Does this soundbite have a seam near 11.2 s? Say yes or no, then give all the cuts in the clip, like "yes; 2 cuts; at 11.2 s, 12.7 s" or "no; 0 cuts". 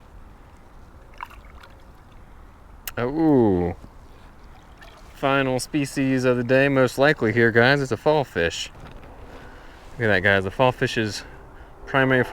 no; 1 cut; at 8.8 s